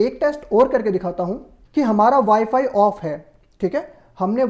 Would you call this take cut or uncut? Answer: uncut